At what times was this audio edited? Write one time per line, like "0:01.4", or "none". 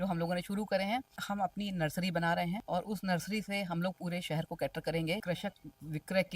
0:01.2
0:02.6
0:05.2